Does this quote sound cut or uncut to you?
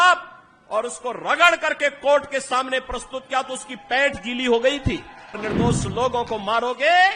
cut